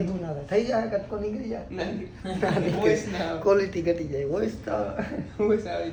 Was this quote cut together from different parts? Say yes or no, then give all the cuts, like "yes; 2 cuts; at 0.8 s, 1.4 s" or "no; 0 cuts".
no; 0 cuts